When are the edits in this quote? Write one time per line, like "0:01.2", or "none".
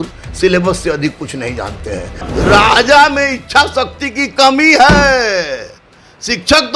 0:02.2